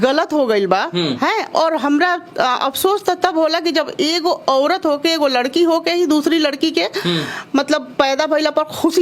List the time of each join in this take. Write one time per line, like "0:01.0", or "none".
none